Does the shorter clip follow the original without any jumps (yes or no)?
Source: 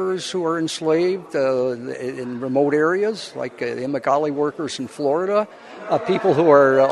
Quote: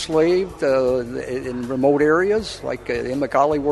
yes